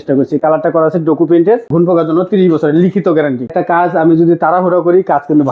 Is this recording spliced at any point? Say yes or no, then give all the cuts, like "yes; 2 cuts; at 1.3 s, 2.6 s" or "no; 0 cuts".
yes; 2 cuts; at 1.7 s, 3.5 s